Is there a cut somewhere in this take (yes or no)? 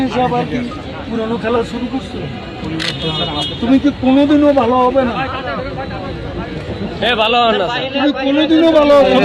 no